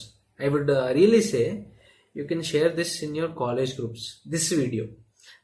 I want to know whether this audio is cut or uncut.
uncut